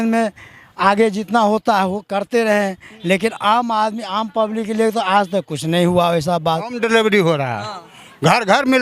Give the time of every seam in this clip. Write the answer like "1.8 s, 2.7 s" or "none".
6.7 s